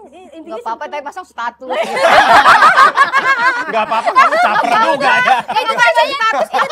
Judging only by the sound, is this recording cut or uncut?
uncut